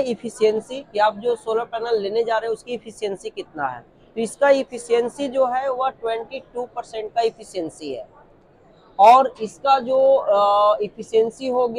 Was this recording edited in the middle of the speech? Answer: no; 0 cuts

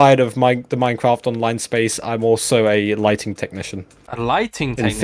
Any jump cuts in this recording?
no; 0 cuts

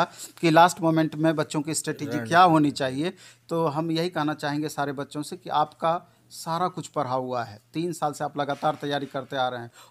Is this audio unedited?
yes; 0 cuts

